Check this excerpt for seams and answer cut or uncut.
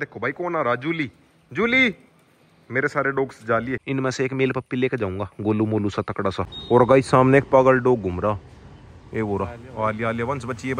cut